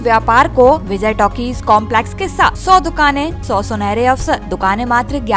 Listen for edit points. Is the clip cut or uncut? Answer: cut